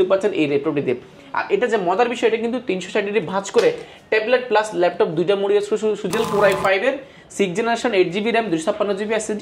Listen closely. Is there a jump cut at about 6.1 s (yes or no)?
yes